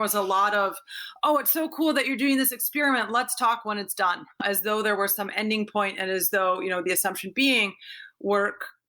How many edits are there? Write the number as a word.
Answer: one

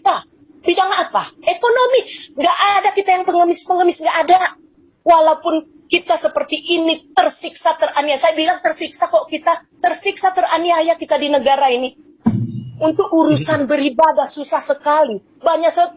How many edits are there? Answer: zero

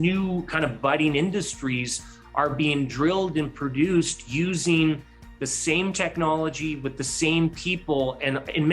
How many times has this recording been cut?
zero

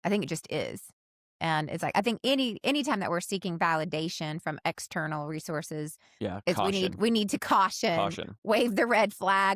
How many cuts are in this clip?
zero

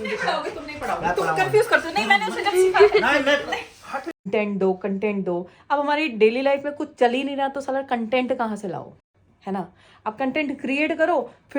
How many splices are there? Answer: one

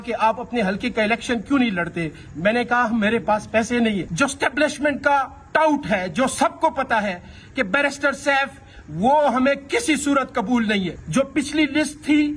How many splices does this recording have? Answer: two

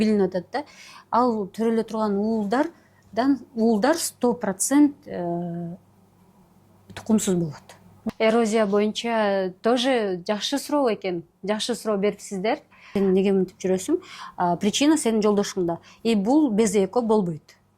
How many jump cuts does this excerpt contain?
two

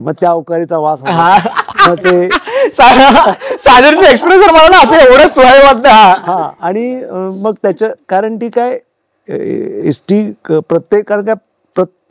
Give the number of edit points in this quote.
zero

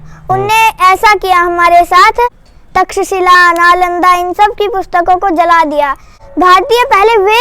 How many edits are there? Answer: two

